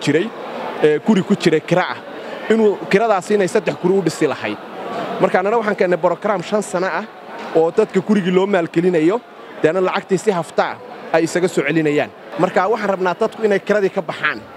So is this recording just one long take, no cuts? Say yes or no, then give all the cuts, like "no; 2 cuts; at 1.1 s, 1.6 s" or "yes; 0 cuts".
no; 1 cut; at 12.2 s